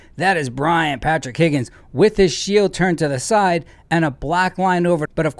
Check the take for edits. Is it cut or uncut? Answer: uncut